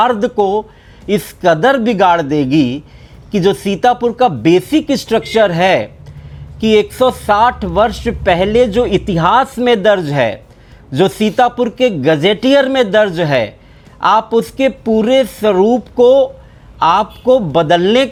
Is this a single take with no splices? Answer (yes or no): yes